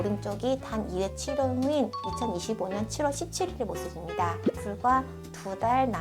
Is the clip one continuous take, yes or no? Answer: yes